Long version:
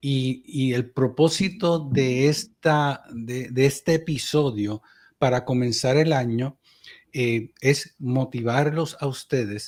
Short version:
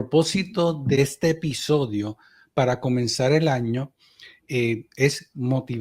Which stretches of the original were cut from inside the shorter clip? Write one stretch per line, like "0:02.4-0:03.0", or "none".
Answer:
0:02.0-0:03.6